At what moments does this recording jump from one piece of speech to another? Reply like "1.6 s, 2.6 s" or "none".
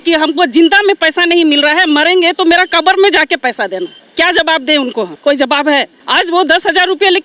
4.0 s, 5.1 s, 6.0 s